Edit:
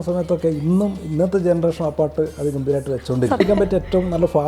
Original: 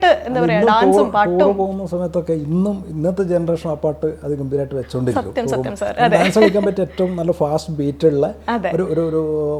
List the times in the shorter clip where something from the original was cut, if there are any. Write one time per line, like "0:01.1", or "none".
0:03.4